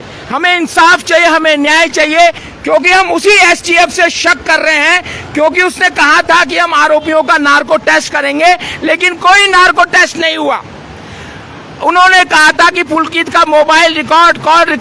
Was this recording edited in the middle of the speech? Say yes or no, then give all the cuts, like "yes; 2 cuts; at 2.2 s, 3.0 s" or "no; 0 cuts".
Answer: yes; 1 cut; at 2.5 s